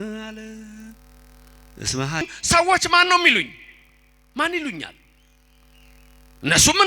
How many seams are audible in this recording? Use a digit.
1